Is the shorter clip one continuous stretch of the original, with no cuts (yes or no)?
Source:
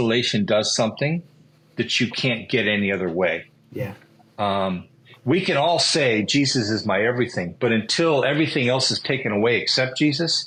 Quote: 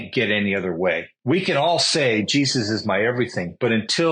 no